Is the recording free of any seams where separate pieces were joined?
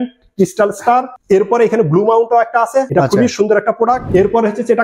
no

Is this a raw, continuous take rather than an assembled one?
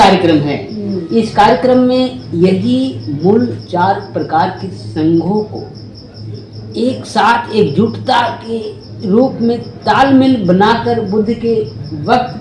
yes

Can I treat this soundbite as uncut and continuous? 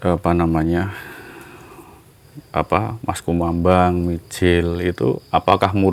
yes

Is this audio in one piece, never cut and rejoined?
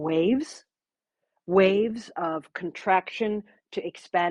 yes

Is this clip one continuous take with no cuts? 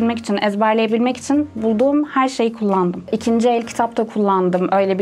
no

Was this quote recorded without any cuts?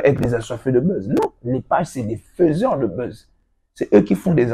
yes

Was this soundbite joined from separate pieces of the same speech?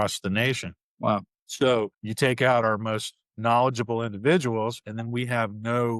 yes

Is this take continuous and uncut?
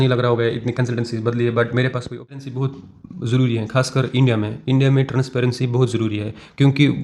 no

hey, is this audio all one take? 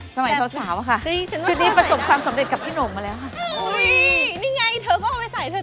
no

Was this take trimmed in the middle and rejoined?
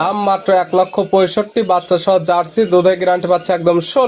no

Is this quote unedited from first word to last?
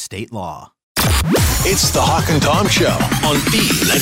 no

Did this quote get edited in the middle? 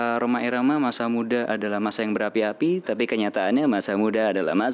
no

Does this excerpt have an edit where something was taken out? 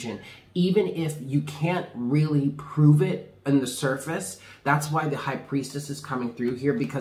no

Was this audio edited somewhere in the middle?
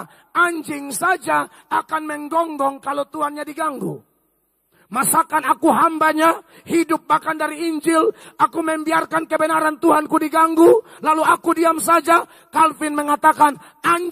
no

